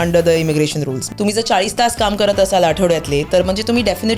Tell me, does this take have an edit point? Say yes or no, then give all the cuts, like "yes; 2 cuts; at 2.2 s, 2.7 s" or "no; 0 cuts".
yes; 1 cut; at 1.1 s